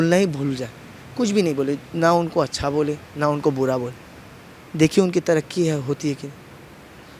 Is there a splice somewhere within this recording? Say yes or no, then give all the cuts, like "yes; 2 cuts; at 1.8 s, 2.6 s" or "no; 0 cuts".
no; 0 cuts